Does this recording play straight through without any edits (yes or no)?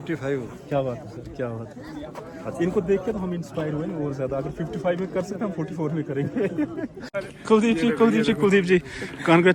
yes